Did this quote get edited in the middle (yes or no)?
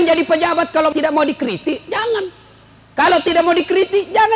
yes